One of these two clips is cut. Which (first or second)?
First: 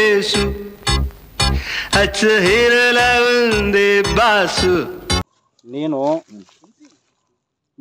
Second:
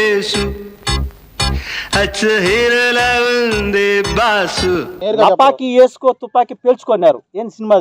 second